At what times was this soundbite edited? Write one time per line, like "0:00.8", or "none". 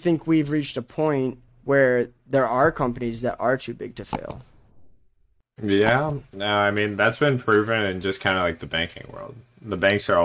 0:01.5